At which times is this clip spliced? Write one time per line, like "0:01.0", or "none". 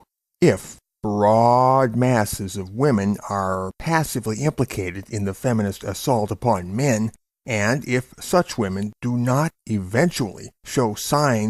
0:09.0